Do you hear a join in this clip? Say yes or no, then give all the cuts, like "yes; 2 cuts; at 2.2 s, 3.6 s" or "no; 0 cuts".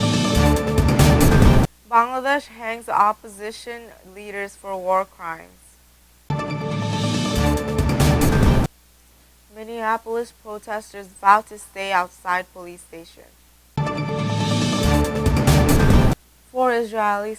yes; 1 cut; at 1.3 s